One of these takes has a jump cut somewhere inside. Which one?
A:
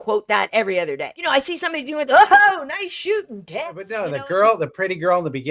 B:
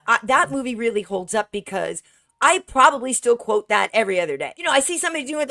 A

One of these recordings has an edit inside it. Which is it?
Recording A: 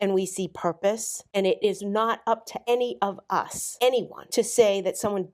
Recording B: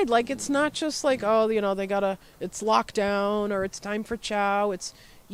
A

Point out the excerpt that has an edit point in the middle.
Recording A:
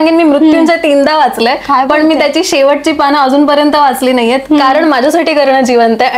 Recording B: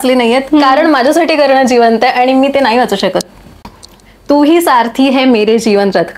B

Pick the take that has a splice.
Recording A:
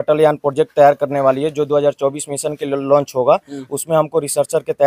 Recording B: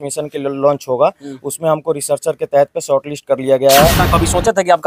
B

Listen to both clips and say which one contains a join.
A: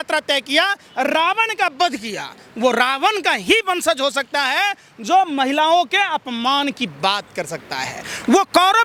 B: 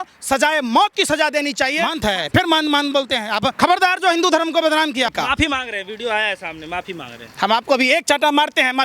B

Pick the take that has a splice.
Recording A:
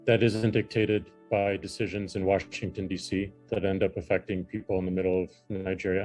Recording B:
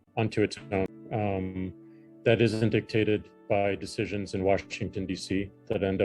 B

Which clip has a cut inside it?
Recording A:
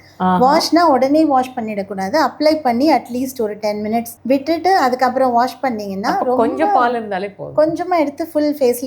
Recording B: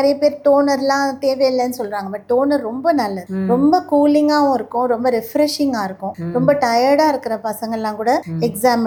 A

